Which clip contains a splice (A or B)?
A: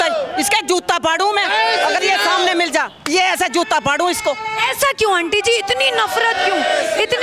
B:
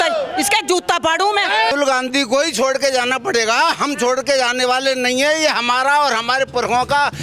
B